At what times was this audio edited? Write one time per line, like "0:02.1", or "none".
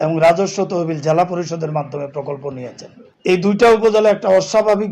0:03.3